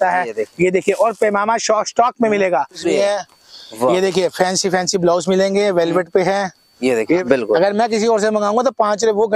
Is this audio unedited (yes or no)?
no